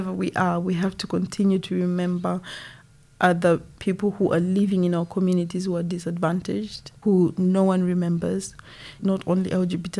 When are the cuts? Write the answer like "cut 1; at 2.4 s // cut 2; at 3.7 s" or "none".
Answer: cut 1; at 3.7 s // cut 2; at 6.9 s // cut 3; at 9.0 s